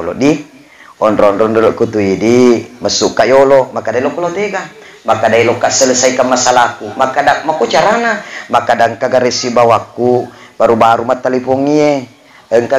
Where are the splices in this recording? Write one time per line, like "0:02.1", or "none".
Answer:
none

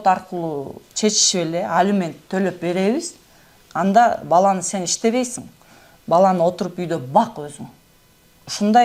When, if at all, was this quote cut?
none

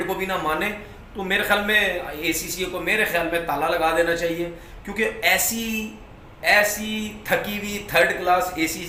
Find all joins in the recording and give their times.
none

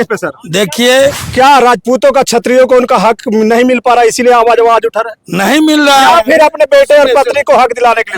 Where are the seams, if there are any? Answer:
0:01.2

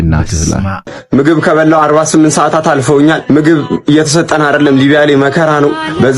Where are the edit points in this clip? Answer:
0:00.9

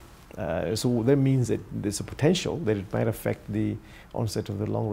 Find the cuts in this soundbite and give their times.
none

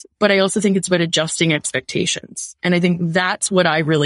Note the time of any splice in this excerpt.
none

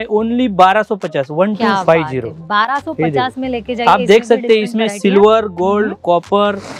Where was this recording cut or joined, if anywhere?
none

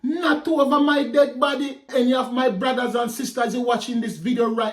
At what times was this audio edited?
0:01.8

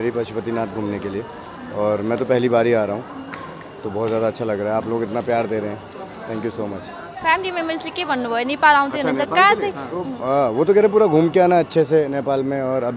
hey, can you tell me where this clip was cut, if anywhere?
none

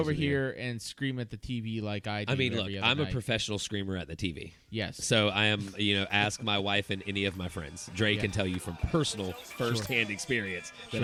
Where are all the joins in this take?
none

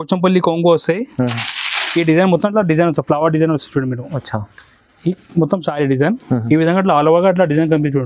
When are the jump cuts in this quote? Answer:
none

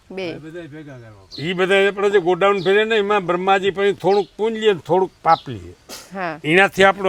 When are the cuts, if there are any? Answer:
none

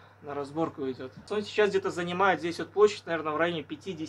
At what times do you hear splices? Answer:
0:01.3

